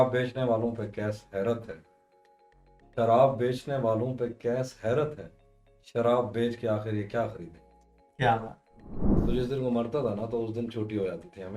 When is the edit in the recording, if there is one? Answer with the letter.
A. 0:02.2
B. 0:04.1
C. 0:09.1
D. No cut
C